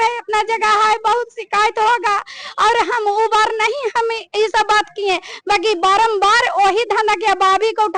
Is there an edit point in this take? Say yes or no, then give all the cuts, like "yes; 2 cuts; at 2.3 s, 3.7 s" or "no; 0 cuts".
no; 0 cuts